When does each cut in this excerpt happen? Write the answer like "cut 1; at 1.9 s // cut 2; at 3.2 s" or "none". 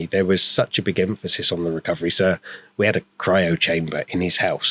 none